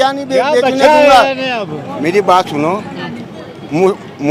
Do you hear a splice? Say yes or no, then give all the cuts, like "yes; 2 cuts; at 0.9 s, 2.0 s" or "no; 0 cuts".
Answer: no; 0 cuts